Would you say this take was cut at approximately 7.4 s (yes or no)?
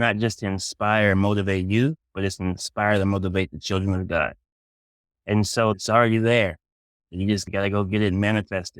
yes